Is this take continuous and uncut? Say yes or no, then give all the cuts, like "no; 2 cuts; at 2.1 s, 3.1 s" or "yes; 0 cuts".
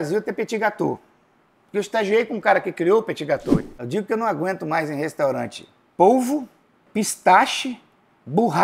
no; 2 cuts; at 3.6 s, 6.8 s